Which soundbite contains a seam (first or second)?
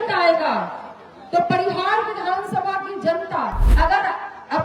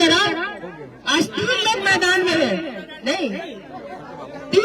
first